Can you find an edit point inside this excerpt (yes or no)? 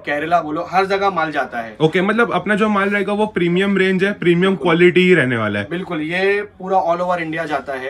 no